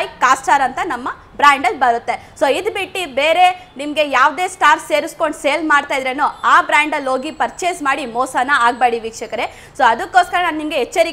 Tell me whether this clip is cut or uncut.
uncut